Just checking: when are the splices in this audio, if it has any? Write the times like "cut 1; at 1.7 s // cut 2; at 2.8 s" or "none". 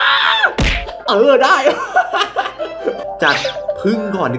cut 1; at 3.0 s